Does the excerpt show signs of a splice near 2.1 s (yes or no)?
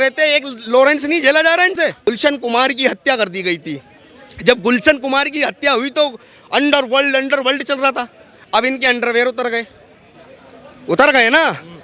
yes